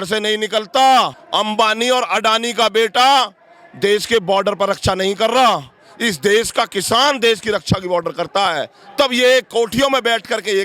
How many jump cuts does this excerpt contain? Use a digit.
1